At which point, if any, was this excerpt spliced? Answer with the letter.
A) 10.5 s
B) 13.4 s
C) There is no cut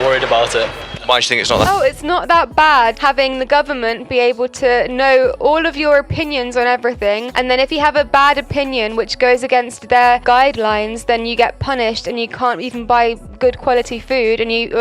C